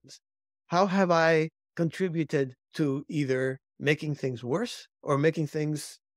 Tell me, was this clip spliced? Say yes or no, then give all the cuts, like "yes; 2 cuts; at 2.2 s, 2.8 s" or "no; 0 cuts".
yes; 4 cuts; at 1.6 s, 2.6 s, 3.7 s, 4.9 s